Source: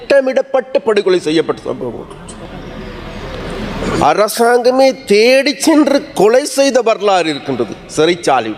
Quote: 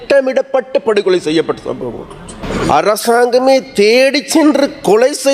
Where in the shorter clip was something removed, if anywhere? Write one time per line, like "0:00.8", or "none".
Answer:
0:02.4